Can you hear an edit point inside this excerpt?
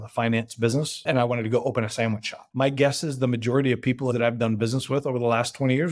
yes; 3 cuts; at 1.0 s, 2.4 s, 4.1 s

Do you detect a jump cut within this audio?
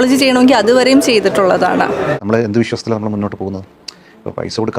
yes; 1 cut; at 2.2 s

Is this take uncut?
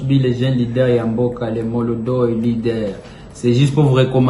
yes; 0 cuts

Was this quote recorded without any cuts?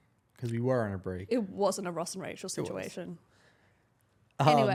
yes; 0 cuts

